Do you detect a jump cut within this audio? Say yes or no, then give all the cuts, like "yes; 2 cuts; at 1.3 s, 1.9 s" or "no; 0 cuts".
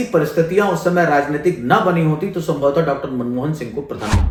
no; 0 cuts